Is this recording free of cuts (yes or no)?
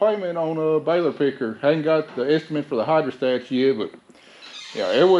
yes